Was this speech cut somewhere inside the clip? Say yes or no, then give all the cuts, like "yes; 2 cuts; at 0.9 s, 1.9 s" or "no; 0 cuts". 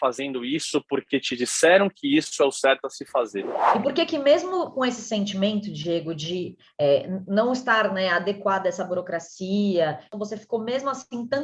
yes; 2 cuts; at 3.7 s, 10.1 s